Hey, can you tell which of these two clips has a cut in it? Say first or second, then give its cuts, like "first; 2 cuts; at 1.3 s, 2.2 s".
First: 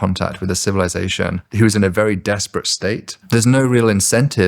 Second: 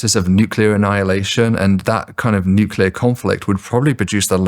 first; 2 cuts; at 1.4 s, 3.2 s